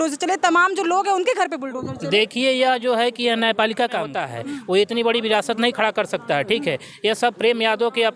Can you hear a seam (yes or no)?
yes